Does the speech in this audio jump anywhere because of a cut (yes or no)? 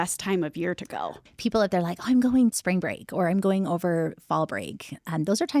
yes